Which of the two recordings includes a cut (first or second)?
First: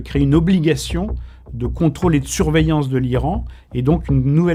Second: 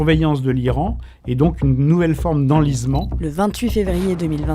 second